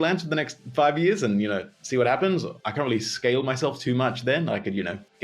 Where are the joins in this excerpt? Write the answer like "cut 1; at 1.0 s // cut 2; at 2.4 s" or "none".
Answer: cut 1; at 2.6 s